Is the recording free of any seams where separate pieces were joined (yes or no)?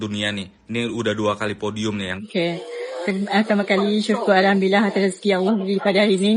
no